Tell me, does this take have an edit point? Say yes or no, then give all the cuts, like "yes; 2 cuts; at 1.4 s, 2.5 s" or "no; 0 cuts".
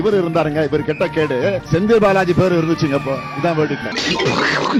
no; 0 cuts